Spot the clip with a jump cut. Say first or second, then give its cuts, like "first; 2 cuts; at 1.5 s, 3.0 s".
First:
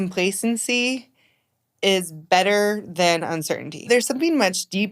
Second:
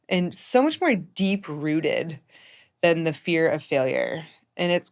first; 1 cut; at 3.9 s